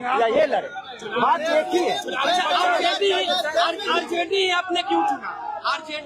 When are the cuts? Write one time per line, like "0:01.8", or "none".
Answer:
none